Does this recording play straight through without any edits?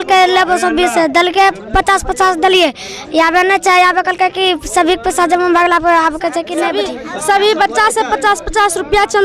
no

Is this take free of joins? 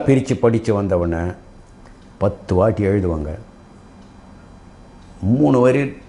yes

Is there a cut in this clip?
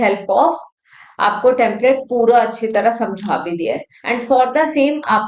yes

